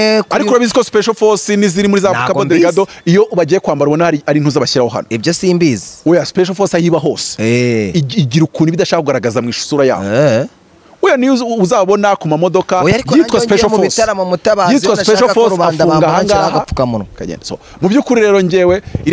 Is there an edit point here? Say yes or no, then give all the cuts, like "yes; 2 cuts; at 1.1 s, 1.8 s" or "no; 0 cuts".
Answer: no; 0 cuts